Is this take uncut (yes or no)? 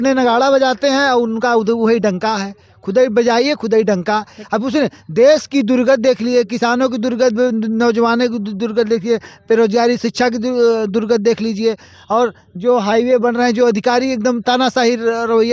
yes